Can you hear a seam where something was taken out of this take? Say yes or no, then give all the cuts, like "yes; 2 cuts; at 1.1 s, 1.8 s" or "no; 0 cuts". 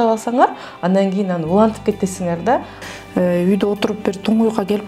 yes; 1 cut; at 2.7 s